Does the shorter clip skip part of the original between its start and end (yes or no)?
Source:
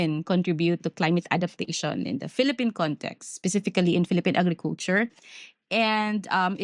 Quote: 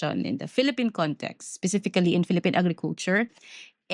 no